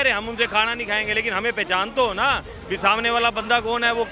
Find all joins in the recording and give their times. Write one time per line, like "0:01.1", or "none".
none